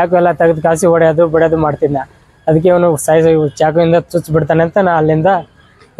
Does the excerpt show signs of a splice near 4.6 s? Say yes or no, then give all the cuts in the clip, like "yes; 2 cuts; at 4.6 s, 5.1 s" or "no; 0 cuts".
no; 0 cuts